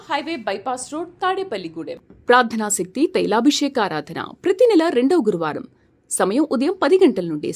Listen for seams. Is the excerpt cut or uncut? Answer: cut